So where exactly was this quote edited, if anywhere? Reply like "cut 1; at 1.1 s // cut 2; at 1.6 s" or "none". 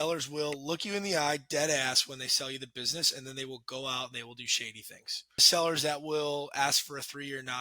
cut 1; at 5.5 s

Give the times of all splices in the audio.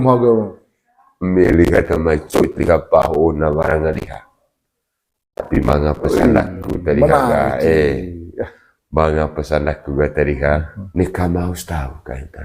cut 1; at 10.8 s

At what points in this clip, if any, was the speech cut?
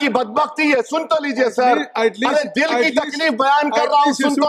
none

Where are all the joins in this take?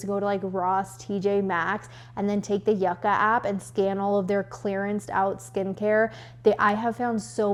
none

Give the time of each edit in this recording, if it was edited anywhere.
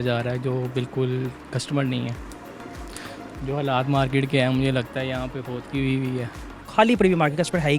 cut 1; at 6.6 s

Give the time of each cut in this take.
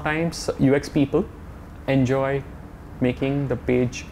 none

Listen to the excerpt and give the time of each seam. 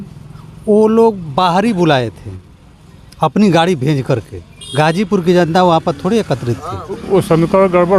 cut 1; at 7.0 s

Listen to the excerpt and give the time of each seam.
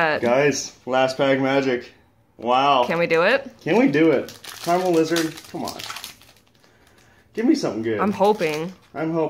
cut 1; at 3.0 s

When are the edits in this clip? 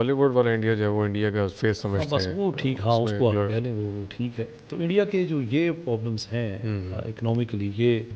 none

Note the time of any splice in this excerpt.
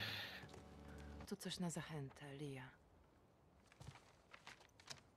cut 1; at 1.2 s

